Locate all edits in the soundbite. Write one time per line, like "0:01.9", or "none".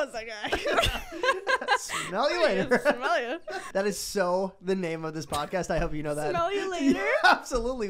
0:03.6